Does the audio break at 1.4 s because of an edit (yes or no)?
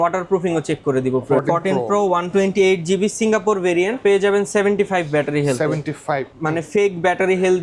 yes